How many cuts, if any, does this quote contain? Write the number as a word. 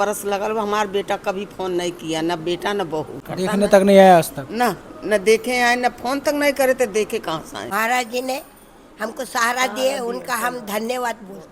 two